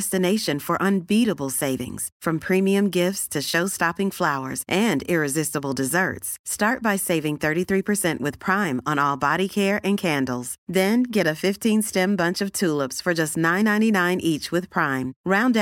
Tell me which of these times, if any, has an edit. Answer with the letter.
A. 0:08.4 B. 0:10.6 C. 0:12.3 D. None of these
D